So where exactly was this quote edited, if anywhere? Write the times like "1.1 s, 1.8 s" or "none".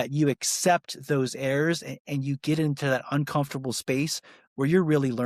none